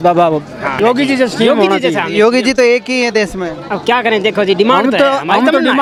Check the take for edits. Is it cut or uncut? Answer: uncut